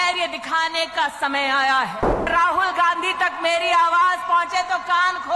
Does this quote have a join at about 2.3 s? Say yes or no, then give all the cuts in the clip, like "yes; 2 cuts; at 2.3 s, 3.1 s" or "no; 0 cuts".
yes; 1 cut; at 2.3 s